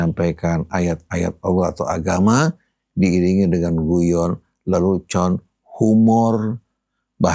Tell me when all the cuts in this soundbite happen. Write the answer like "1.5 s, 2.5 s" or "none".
none